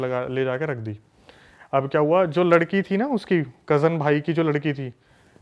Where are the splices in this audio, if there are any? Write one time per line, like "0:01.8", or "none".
none